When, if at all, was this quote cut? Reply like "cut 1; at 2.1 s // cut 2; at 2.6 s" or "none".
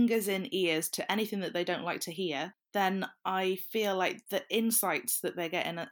cut 1; at 2.6 s